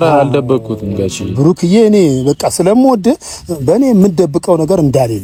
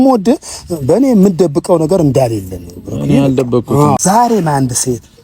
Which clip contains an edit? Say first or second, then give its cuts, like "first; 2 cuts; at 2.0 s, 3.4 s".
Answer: second; 1 cut; at 4.0 s